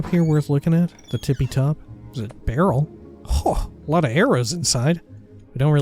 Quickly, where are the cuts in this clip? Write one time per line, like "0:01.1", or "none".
0:02.0